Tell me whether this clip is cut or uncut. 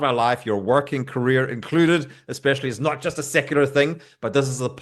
uncut